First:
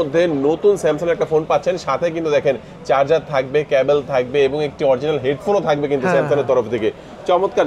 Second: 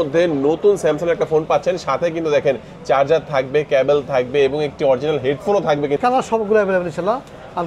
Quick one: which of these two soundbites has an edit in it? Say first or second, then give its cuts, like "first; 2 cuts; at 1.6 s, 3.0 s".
second; 1 cut; at 6.0 s